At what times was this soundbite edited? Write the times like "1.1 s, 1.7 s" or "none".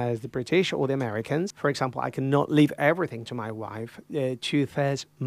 1.5 s